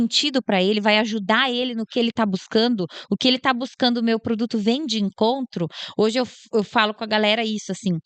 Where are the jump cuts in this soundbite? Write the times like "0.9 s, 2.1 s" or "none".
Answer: none